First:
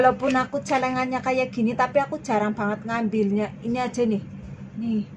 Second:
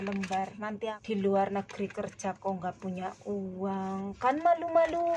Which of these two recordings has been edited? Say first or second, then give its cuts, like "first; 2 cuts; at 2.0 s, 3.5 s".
second; 1 cut; at 1.0 s